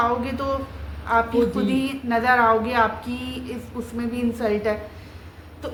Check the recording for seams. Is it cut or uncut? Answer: uncut